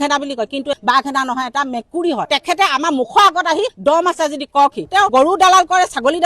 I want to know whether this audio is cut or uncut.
cut